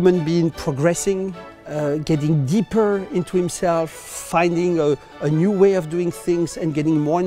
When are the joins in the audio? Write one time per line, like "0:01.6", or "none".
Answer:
none